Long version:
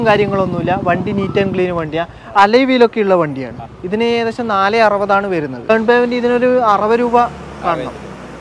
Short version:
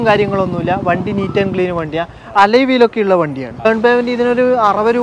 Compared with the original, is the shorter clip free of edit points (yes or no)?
no